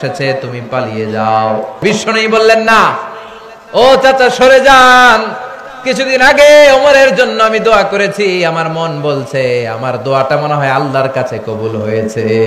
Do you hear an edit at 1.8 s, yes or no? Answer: yes